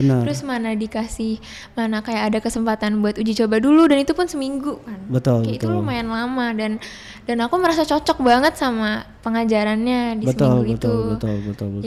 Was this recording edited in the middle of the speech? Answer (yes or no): no